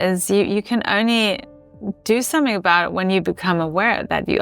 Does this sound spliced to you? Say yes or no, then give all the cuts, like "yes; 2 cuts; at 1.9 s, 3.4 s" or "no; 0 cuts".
no; 0 cuts